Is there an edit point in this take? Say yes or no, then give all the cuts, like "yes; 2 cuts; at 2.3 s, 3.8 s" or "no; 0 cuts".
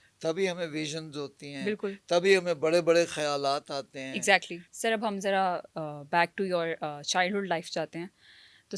yes; 1 cut; at 4.6 s